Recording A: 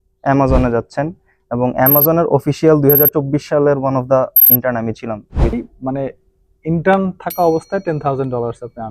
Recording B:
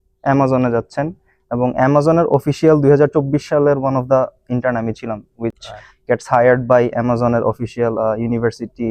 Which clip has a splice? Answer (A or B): A